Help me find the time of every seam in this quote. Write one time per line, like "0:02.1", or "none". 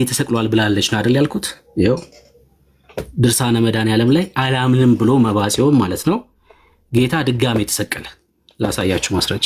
none